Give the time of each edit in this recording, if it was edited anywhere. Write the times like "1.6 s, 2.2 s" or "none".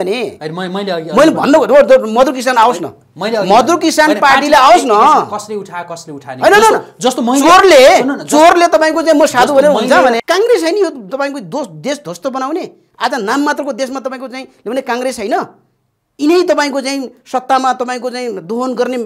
10.2 s